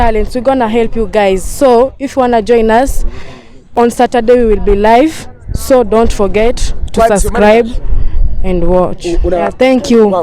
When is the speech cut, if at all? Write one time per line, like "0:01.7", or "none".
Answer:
0:03.6
0:09.4